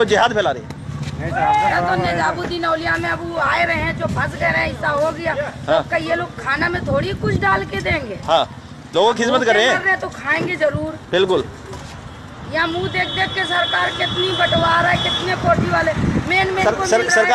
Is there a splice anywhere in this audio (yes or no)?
no